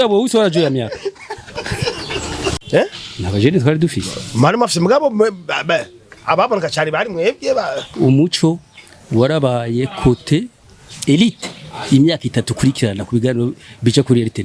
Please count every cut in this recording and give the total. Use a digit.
1